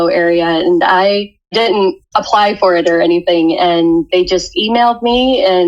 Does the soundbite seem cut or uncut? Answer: cut